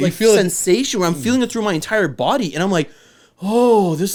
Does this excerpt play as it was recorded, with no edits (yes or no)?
yes